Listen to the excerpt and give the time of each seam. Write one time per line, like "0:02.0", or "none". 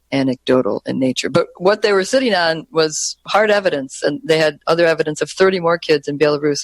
0:03.2